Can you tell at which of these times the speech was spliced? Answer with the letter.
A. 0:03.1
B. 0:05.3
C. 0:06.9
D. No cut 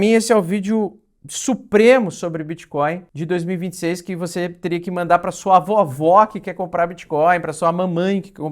A